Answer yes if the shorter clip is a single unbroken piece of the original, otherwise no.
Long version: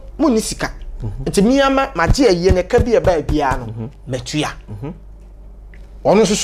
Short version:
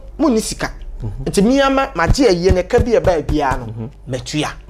yes